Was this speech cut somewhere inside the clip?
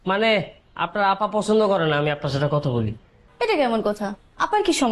no; 0 cuts

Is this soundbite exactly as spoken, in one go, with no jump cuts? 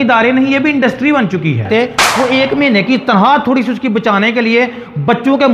no; 1 cut; at 1.7 s

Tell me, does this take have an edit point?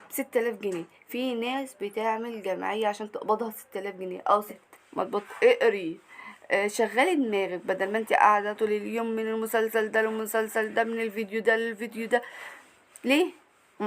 yes; 1 cut; at 4.6 s

